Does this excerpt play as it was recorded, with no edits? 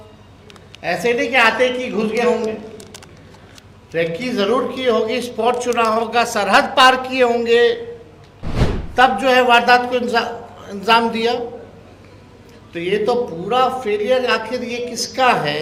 yes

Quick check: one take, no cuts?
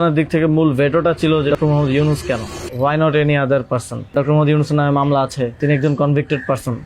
no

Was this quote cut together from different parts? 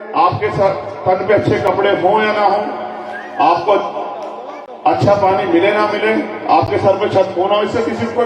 no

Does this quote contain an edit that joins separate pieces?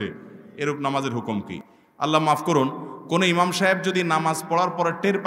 no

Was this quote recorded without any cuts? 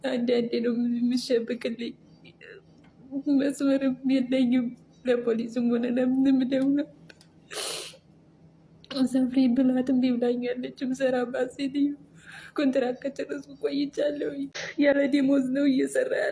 no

